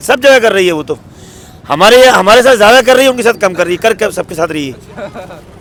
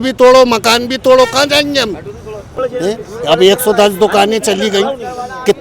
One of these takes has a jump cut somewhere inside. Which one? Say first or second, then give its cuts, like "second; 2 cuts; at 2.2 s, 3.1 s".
second; 1 cut; at 2.4 s